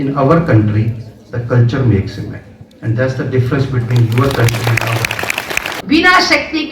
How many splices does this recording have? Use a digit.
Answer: 1